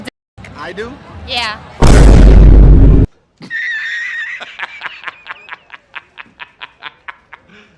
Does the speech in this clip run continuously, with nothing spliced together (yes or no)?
yes